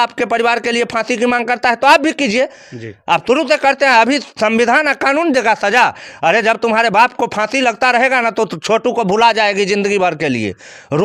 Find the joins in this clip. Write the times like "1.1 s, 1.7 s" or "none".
none